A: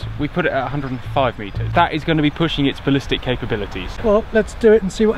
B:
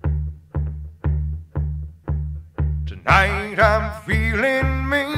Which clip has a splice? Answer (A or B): A